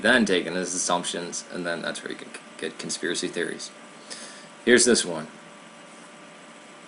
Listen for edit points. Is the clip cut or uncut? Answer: cut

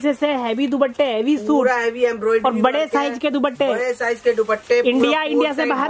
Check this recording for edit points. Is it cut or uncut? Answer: uncut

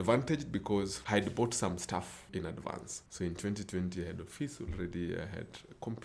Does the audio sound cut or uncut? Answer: cut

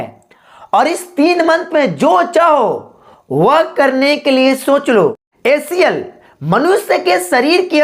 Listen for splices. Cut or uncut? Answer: cut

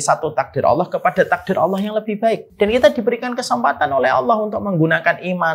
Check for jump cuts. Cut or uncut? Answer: cut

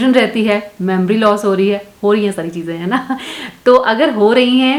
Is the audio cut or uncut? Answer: uncut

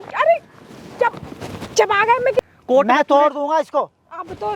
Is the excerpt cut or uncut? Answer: cut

